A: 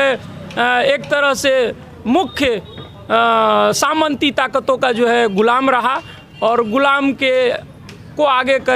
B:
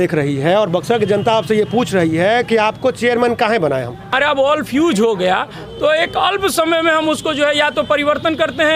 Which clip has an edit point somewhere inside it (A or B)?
B